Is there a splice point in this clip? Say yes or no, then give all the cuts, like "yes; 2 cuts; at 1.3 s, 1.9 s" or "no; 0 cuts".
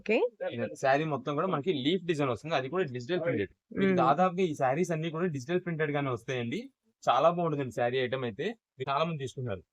yes; 1 cut; at 8.8 s